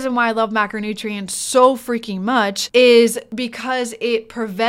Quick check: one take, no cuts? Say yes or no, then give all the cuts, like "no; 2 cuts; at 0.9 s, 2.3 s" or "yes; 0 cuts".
no; 2 cuts; at 2.6 s, 3.2 s